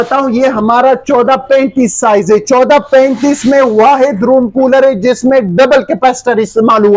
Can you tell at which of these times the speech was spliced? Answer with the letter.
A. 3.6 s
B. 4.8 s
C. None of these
C